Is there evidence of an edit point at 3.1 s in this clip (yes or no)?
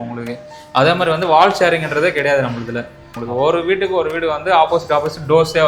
yes